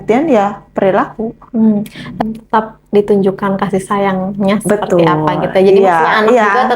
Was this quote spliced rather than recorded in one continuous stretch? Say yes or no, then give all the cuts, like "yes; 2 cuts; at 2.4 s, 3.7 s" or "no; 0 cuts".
yes; 1 cut; at 2.2 s